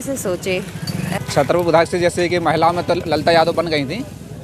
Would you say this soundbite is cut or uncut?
cut